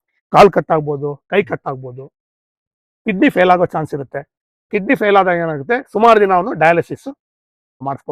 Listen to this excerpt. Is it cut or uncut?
uncut